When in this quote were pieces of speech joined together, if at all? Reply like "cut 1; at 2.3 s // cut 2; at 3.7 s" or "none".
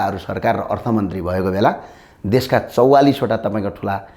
none